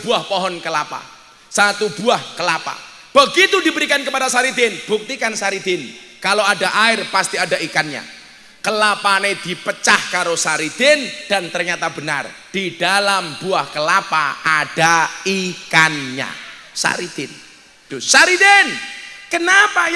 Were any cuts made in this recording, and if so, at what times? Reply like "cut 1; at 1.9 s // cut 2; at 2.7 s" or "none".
cut 1; at 17.8 s